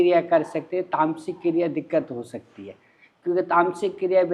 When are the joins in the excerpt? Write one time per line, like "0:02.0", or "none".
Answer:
none